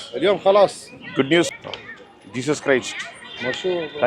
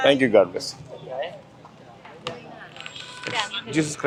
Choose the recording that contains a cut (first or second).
first